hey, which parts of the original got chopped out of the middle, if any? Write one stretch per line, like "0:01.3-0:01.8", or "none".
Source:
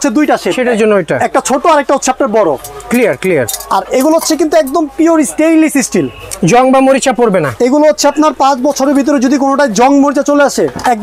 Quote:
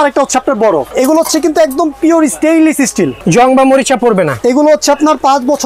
0:02.6-0:03.9
0:06.1-0:06.3